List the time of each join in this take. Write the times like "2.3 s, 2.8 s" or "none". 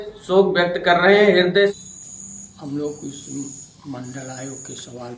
1.7 s